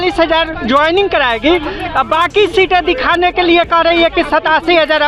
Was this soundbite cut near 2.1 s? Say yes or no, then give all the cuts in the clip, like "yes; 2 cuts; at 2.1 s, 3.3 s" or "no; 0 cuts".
no; 0 cuts